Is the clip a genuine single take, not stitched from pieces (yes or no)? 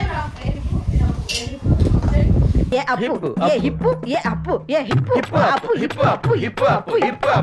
yes